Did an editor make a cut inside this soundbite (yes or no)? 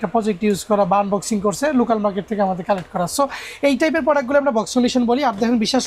no